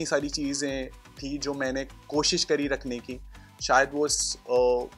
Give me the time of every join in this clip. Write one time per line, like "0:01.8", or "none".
none